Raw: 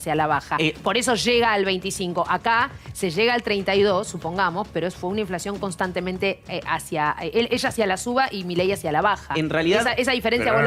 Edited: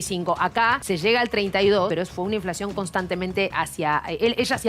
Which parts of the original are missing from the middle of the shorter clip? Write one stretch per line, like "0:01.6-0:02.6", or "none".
0:02.7-0:02.9
0:04.0-0:04.7
0:06.4-0:06.7